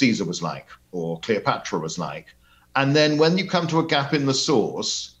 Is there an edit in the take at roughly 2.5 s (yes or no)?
no